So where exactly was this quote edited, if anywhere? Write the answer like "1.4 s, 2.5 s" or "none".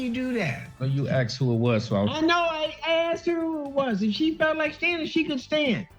none

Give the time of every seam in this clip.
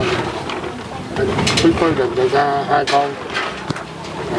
1.3 s

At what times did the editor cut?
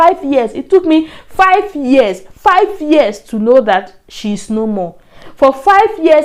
none

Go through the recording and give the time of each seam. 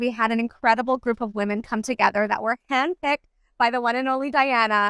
none

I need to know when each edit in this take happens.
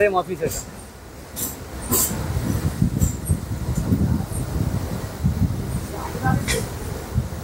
none

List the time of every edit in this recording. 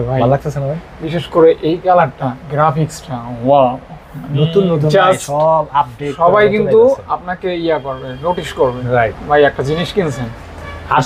none

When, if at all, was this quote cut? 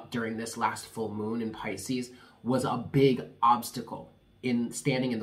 none

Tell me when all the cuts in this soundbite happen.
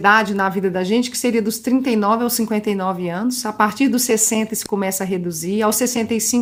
none

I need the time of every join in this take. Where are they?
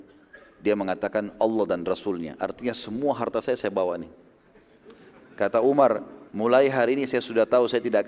none

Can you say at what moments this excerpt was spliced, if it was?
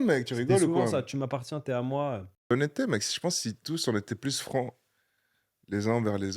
2.5 s

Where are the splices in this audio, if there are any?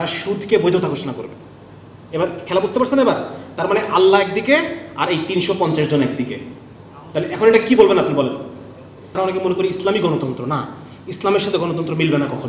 9.1 s

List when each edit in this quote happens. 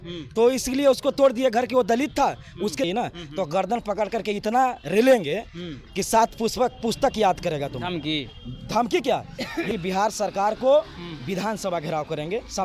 2.8 s, 9.7 s

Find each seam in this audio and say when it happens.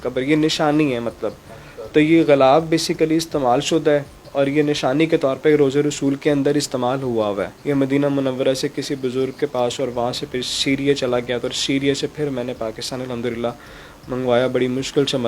none

